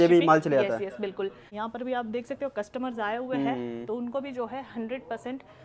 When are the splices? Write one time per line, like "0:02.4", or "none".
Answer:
0:01.5